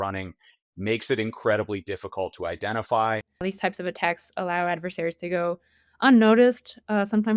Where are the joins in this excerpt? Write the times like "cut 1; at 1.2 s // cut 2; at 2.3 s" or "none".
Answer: cut 1; at 3.3 s